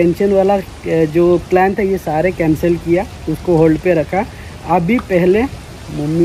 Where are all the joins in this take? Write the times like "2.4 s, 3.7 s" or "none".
none